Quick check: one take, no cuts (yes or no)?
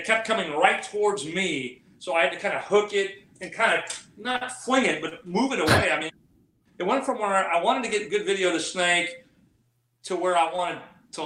no